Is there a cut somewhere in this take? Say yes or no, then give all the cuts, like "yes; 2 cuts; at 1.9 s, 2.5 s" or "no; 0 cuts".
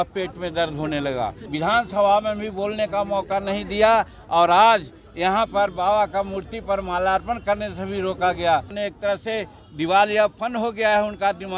yes; 2 cuts; at 1.4 s, 8.8 s